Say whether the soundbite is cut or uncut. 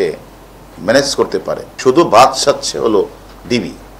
cut